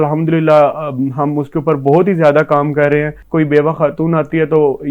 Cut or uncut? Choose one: cut